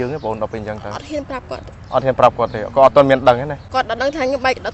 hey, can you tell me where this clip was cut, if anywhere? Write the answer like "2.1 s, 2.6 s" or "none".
3.6 s